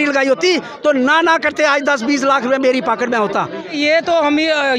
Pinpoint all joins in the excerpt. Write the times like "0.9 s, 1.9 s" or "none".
3.7 s